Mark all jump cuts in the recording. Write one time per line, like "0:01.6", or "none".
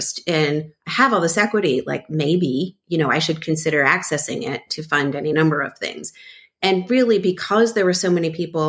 none